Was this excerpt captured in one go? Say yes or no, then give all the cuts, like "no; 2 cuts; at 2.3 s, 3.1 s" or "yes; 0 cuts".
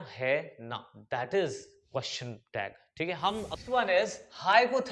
no; 1 cut; at 3.6 s